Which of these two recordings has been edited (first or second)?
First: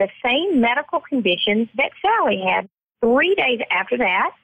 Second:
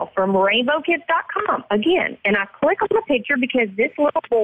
first